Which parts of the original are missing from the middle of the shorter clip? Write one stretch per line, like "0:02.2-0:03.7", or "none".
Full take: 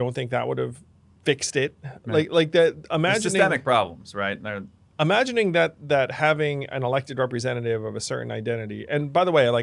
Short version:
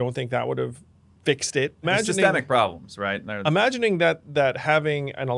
0:01.8-0:03.0
0:04.4-0:04.8